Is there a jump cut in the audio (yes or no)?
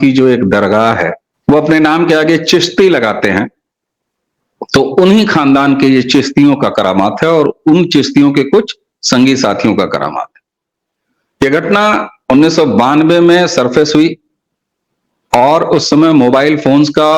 yes